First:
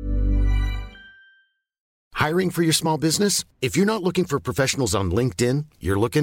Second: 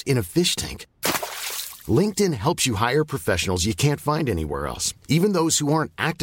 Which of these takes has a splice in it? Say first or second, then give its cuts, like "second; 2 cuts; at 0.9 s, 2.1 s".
first; 1 cut; at 2.0 s